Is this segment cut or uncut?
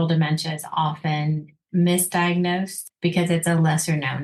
cut